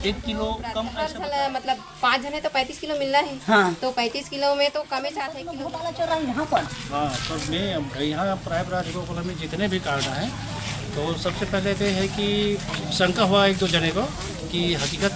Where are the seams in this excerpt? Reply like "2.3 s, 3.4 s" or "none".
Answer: 1.0 s, 5.5 s